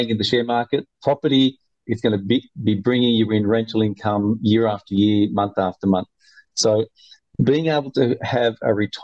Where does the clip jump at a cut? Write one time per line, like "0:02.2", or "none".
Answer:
0:01.9